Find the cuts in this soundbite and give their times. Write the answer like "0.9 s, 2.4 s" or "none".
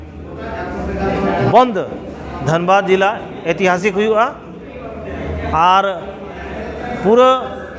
none